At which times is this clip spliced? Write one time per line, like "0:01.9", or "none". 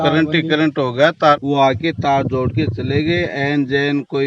0:01.1